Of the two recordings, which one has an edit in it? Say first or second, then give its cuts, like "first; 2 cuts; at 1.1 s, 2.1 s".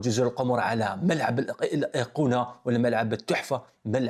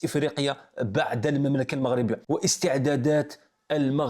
second; 1 cut; at 2.2 s